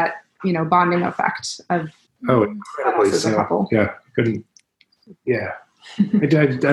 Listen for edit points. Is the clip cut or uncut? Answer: cut